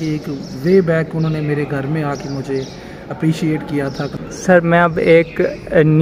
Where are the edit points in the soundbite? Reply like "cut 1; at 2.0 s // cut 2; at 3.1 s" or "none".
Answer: cut 1; at 4.2 s